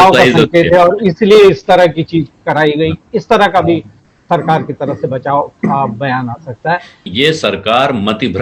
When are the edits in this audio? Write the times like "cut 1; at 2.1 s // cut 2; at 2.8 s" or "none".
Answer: cut 1; at 7.0 s